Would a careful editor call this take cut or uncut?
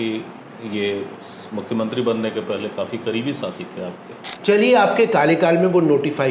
cut